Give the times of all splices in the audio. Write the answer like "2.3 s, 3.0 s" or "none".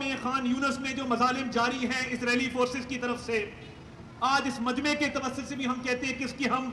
none